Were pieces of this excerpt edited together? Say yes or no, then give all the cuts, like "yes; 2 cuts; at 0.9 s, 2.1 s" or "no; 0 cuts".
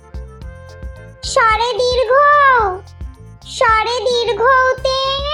no; 0 cuts